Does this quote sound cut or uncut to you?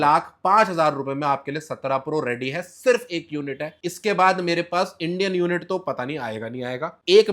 uncut